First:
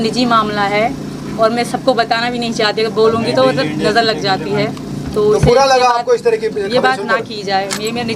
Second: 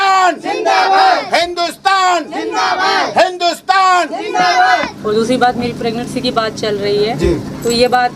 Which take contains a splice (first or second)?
second